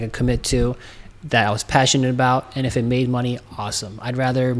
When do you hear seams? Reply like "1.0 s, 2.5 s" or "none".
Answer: none